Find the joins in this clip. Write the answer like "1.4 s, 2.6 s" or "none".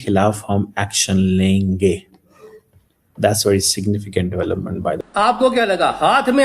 5.0 s